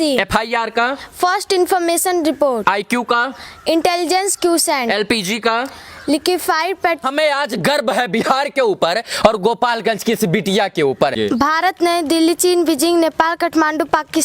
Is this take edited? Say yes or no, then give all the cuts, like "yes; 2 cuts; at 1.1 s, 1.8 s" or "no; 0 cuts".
yes; 2 cuts; at 7.0 s, 11.1 s